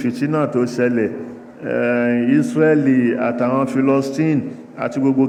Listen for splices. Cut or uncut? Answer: uncut